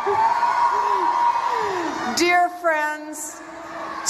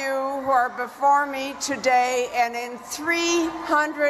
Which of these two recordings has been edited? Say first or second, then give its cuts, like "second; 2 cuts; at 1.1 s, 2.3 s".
first; 1 cut; at 1.7 s